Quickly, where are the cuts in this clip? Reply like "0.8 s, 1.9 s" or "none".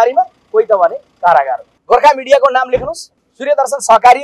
1.7 s